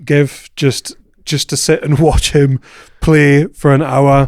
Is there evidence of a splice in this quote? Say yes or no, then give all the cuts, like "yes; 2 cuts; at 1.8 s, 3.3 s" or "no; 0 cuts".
no; 0 cuts